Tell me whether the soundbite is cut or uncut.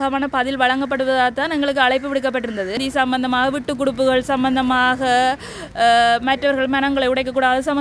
cut